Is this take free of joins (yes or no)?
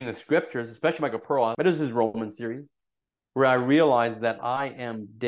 no